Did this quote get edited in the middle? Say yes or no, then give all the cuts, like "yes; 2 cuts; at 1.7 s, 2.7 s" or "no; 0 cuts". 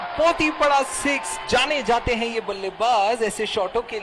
no; 0 cuts